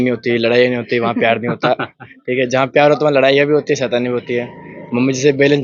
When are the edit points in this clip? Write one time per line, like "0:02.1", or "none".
none